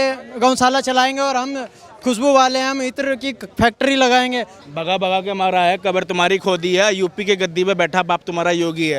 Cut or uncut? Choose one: cut